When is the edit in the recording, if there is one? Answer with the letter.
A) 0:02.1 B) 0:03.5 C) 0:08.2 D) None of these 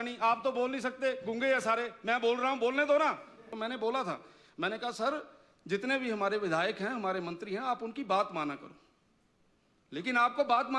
B